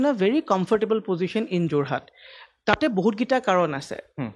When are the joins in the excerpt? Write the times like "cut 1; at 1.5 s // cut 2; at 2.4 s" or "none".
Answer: none